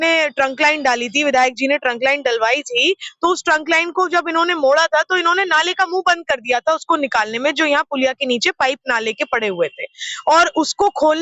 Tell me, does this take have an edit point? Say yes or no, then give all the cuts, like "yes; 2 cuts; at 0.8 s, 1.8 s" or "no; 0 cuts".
no; 0 cuts